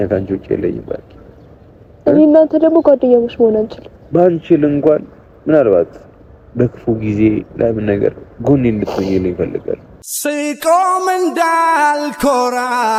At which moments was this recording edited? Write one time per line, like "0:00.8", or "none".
none